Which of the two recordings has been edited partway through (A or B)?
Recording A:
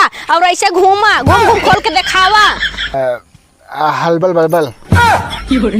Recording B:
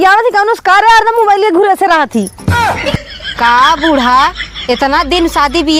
A